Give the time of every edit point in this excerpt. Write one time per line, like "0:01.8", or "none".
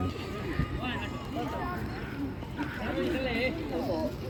none